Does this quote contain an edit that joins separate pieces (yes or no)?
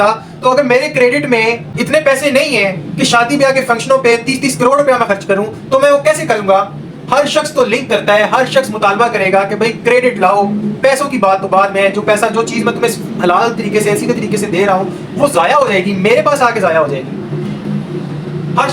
yes